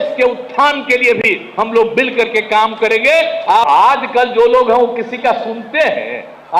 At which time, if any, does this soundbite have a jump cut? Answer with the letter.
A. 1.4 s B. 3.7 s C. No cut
B